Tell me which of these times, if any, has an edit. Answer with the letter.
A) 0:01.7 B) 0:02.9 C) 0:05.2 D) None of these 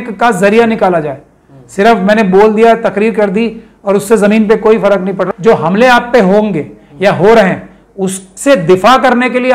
C